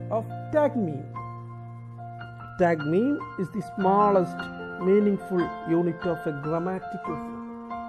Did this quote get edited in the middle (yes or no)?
yes